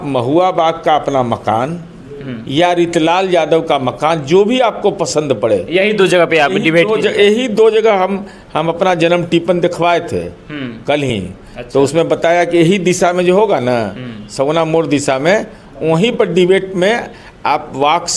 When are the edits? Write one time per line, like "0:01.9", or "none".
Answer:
none